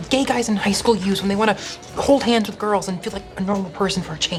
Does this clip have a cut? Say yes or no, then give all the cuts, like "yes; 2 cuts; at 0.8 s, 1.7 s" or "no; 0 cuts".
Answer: no; 0 cuts